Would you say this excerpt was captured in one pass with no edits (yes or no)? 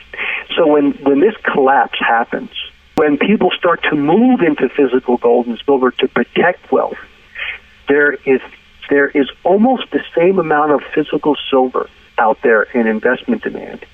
no